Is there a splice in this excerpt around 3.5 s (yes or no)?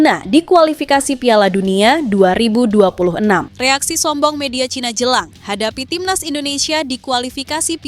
yes